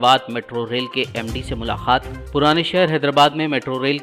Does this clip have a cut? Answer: no; 0 cuts

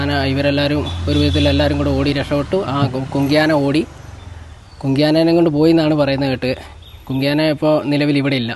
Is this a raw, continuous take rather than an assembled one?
yes; 0 cuts

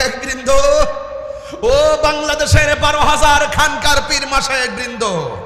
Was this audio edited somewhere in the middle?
no; 0 cuts

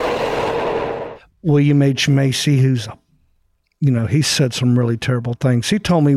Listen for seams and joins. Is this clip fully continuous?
no; 1 cut; at 1.1 s

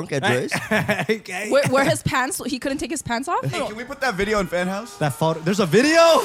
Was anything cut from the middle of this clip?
yes; 1 cut; at 3.5 s

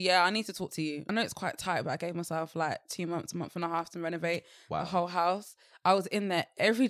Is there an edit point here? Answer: yes; 1 cut; at 1.1 s

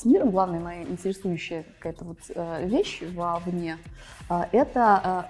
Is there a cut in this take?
no; 0 cuts

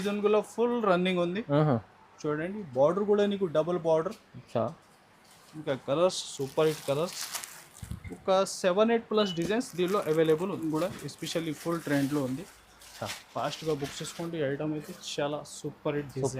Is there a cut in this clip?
yes; 1 cut; at 10.6 s

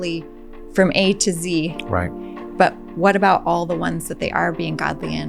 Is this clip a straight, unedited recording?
yes; 0 cuts

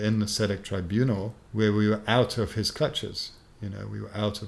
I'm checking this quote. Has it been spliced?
yes; 1 cut; at 1.4 s

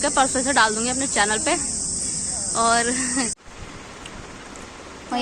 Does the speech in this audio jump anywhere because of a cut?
yes; 1 cut; at 3.5 s

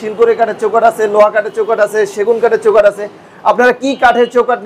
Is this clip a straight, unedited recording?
yes; 0 cuts

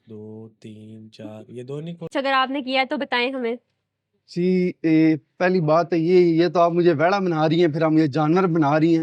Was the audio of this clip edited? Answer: yes; 1 cut; at 2.1 s

